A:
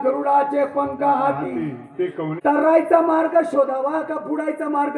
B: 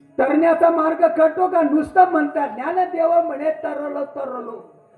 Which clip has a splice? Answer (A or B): A